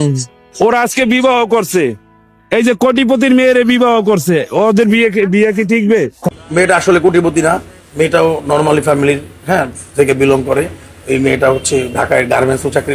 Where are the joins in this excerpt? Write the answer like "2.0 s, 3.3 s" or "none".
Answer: 6.3 s

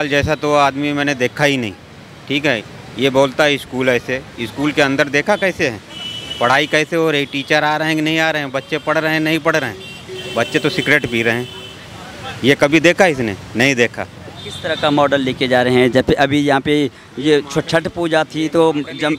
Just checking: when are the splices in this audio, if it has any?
none

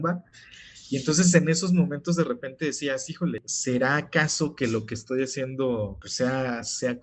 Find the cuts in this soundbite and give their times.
3.5 s, 6.0 s

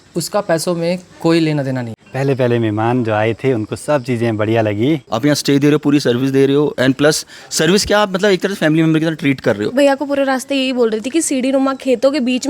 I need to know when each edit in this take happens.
2.0 s, 5.1 s, 9.7 s

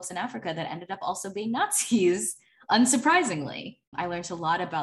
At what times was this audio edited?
3.9 s

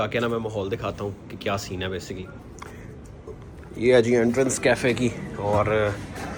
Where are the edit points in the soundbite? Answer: none

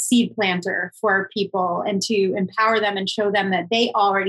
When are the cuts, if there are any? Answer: none

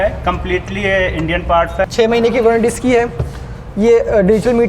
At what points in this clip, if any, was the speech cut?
1.8 s

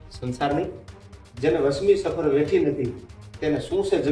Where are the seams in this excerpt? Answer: none

